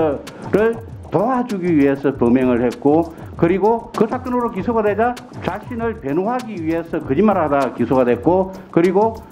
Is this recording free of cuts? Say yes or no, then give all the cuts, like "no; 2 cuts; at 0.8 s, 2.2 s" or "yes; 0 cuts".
no; 2 cuts; at 3.9 s, 5.3 s